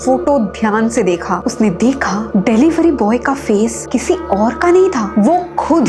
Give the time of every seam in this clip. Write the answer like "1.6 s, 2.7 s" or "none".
none